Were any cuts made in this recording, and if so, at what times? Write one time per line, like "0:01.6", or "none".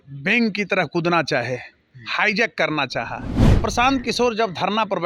0:03.4